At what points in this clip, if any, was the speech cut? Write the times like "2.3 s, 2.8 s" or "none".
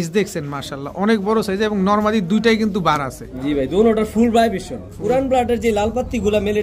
none